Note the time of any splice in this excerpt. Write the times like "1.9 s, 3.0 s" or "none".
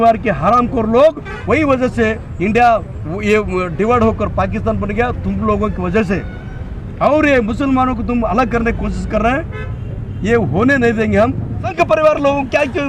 1.3 s, 11.7 s